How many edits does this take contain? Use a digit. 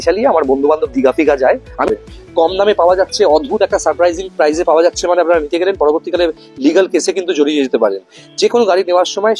1